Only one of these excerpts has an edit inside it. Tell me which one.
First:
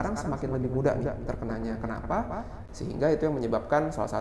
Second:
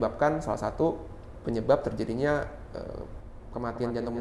first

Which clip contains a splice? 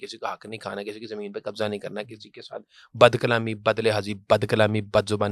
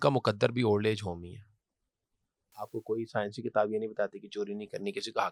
second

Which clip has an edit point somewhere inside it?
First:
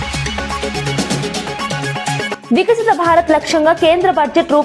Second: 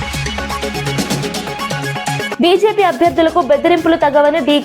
second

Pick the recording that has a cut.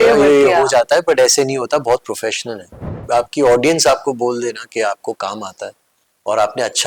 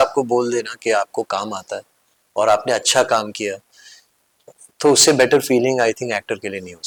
first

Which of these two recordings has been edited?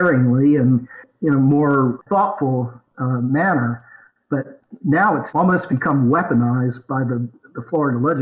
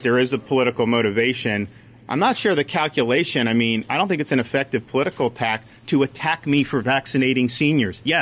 first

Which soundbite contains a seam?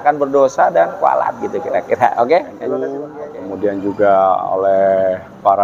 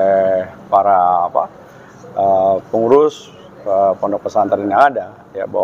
first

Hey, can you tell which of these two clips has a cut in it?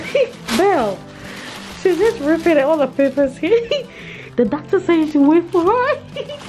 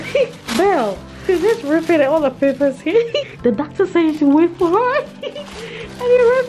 second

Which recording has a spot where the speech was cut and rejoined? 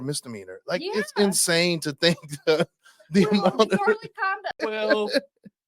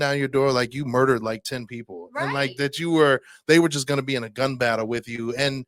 first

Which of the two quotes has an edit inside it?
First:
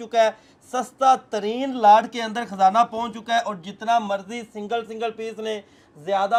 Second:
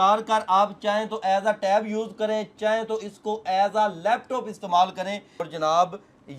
second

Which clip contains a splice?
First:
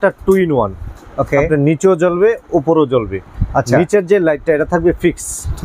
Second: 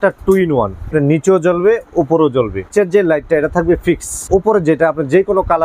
second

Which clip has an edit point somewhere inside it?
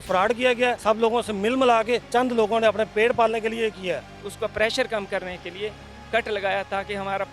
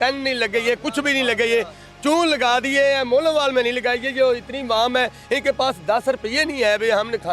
first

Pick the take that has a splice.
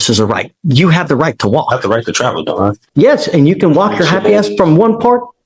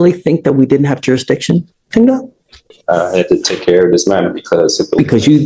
first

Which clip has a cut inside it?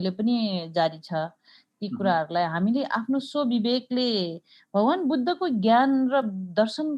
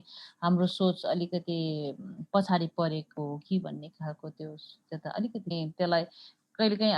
second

